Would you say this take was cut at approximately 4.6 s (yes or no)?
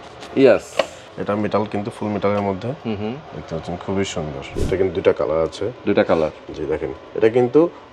yes